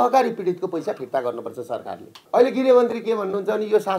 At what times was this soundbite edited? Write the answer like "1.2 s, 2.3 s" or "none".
2.2 s